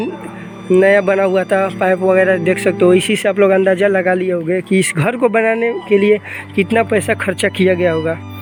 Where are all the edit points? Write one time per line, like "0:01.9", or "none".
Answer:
none